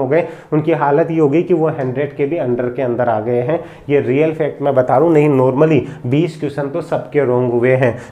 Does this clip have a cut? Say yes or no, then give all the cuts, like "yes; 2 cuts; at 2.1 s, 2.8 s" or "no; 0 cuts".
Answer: no; 0 cuts